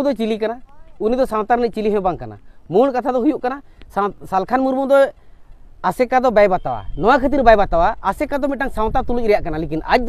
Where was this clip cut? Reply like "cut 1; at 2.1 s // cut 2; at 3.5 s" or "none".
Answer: none